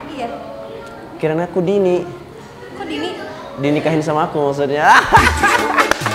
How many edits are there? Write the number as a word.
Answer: zero